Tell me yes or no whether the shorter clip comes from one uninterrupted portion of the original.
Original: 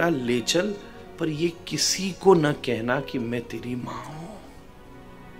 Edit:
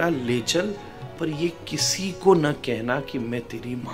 yes